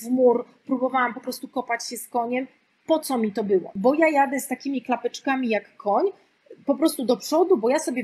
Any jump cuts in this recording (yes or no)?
yes